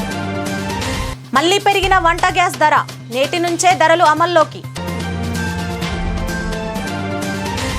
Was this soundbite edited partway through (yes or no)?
yes